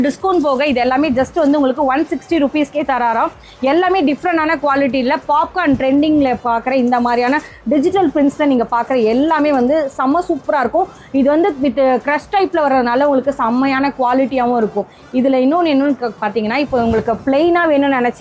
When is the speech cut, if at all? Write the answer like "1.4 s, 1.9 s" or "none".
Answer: none